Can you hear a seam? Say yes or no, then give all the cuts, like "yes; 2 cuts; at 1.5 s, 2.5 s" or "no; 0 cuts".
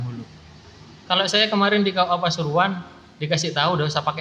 no; 0 cuts